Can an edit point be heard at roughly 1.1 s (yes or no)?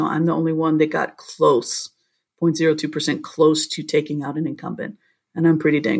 no